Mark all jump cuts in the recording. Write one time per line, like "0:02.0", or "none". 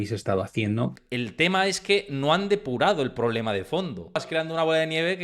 0:01.0
0:04.2